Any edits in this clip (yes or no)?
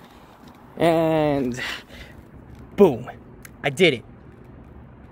no